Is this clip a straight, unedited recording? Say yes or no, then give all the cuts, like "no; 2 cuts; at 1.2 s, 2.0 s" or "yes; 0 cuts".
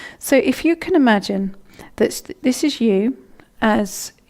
no; 1 cut; at 1.3 s